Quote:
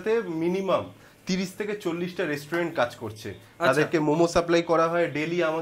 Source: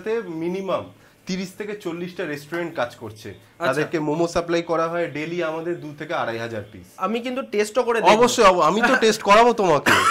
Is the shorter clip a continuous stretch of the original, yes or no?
yes